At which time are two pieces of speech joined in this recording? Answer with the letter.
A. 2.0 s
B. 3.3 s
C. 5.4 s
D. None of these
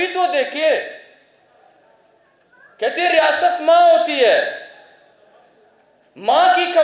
D